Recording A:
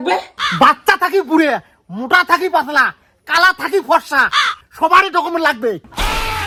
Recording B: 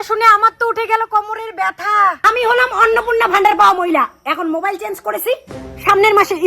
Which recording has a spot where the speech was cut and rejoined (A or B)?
B